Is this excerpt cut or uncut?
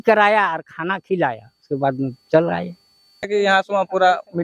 cut